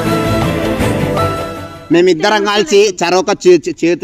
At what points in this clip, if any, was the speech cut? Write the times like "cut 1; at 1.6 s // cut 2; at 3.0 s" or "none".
cut 1; at 1.7 s